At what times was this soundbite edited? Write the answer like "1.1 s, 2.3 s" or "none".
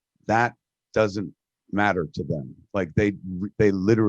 none